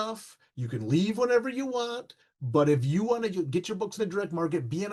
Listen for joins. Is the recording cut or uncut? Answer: uncut